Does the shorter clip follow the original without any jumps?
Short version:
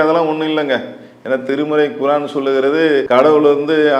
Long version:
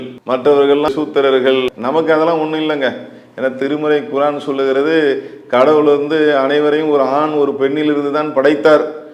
no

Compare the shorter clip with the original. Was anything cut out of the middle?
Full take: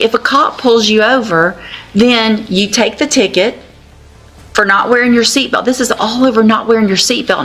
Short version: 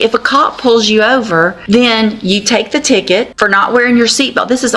yes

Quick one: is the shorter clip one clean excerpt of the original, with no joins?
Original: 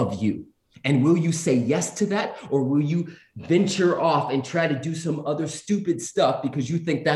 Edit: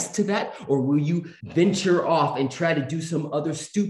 no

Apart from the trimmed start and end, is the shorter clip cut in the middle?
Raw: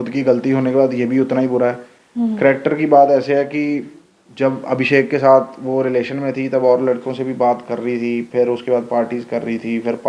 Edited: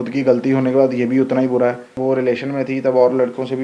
yes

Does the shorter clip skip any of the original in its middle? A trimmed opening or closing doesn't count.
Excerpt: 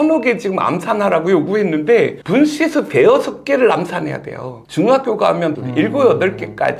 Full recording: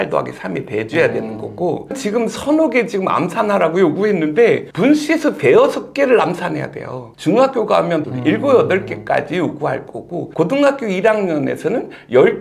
no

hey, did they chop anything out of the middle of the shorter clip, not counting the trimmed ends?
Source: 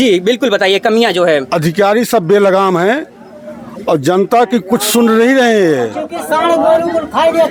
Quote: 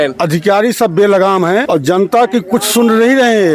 yes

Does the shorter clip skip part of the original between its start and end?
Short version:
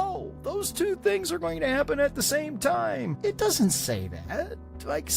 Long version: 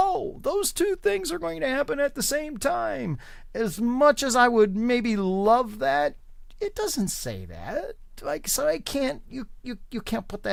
yes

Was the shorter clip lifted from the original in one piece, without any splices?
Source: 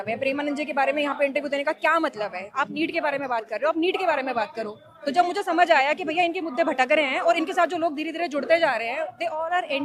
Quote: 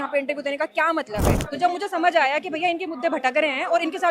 no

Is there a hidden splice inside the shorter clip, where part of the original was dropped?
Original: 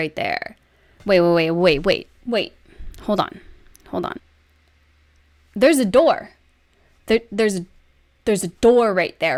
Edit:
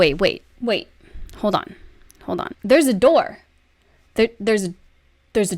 yes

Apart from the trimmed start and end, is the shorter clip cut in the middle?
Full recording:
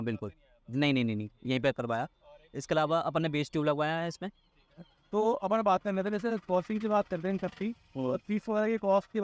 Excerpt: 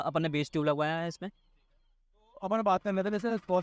no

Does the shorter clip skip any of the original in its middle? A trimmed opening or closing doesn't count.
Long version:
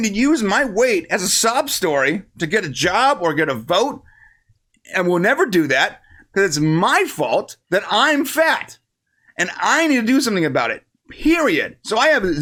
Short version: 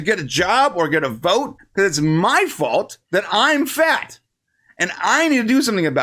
yes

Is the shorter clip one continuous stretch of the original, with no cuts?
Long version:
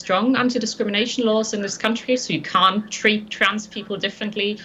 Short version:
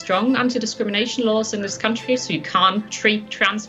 yes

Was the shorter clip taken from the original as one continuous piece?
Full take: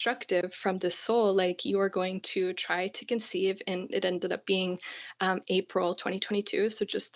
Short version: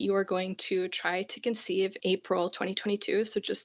no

